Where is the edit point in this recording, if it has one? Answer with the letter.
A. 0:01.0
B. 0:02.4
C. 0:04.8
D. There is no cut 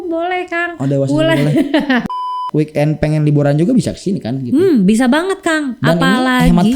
B